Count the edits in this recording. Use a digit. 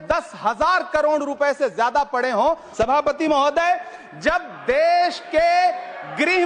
1